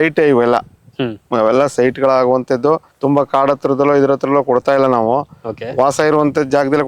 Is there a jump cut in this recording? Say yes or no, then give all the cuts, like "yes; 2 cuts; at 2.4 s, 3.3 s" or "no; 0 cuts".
yes; 1 cut; at 2.9 s